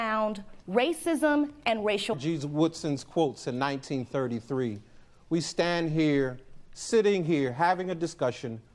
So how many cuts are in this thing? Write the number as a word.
one